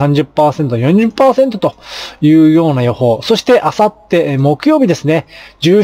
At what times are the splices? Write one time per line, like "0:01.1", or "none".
none